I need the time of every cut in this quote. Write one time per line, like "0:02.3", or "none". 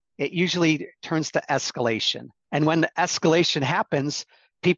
none